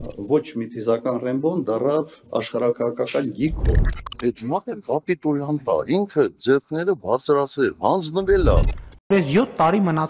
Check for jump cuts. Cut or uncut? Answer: uncut